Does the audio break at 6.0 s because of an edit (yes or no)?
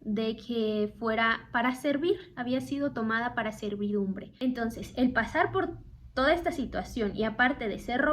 no